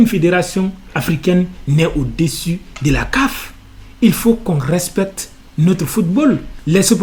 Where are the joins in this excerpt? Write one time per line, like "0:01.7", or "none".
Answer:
none